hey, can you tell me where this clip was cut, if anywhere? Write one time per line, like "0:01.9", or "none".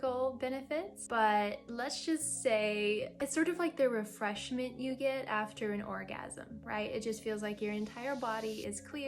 0:01.0
0:03.2